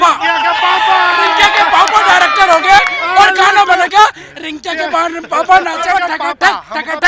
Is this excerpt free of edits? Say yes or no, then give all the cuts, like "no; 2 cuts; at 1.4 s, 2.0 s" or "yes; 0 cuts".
no; 1 cut; at 6.0 s